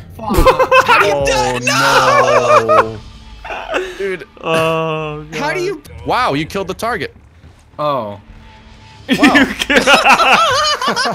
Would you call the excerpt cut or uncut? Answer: cut